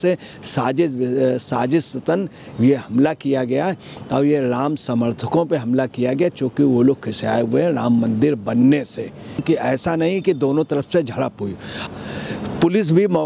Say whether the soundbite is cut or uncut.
cut